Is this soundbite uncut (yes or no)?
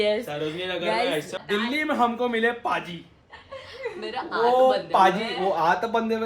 no